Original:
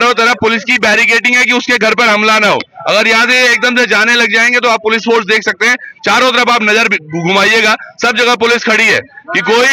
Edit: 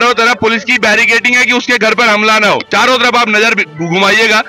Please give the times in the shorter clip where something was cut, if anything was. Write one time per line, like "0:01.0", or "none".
0:02.7